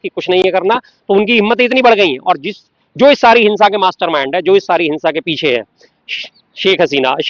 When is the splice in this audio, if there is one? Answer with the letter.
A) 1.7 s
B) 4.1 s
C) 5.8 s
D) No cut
D